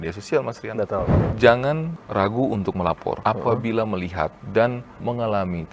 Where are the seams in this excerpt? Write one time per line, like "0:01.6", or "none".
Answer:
0:01.2
0:03.2
0:04.4